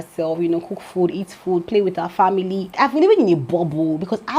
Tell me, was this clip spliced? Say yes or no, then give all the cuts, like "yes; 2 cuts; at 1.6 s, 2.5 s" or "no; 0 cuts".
yes; 1 cut; at 2.7 s